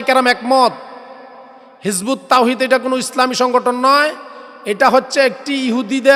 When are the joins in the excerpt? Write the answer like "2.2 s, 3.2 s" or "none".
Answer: none

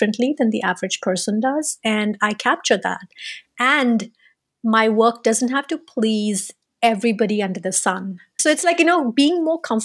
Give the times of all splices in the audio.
8.3 s

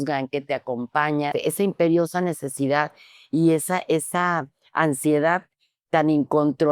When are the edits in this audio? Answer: 1.3 s

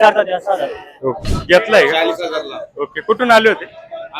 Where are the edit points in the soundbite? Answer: 1.3 s

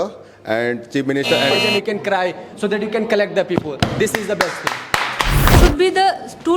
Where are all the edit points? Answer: 1.5 s, 5.5 s

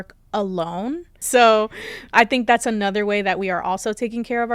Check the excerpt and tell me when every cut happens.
1.2 s

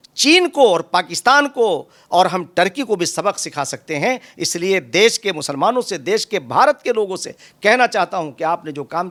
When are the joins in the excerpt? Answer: none

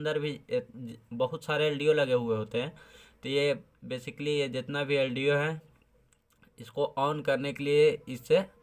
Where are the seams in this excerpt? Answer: none

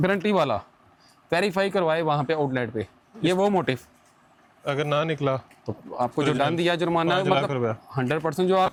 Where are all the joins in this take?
none

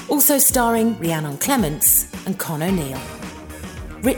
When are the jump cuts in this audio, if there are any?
none

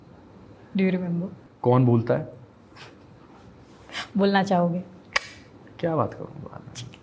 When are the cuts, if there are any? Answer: 1.4 s

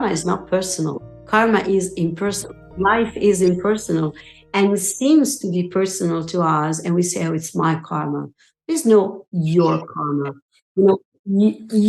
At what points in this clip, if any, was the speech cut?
1.3 s

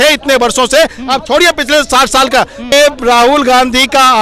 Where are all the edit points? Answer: 2.7 s

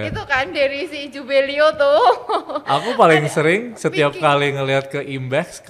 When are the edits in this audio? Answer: none

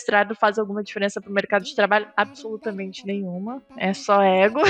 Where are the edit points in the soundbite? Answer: none

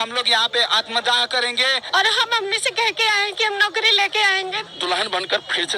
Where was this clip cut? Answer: 1.8 s, 4.6 s

